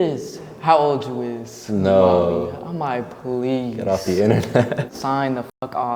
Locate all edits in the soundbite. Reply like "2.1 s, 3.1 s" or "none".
4.9 s